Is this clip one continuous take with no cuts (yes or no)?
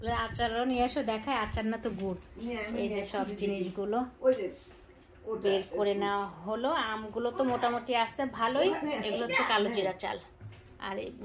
yes